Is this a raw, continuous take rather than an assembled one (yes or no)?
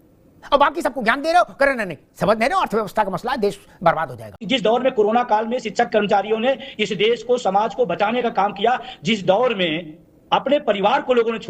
no